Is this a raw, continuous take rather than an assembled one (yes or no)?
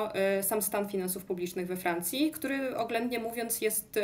yes